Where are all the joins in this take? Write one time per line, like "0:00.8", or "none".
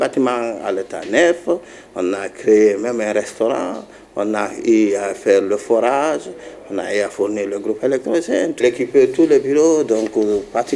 0:08.6